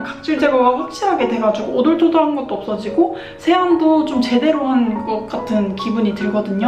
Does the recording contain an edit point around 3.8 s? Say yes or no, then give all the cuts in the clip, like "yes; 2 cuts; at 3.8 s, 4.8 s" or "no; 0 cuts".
no; 0 cuts